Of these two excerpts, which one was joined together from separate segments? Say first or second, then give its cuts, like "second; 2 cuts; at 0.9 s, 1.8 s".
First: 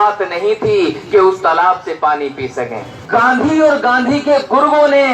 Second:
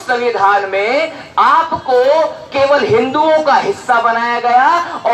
first; 1 cut; at 2.9 s